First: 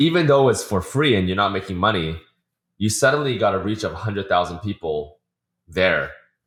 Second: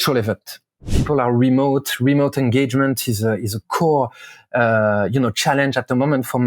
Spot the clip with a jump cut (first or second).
second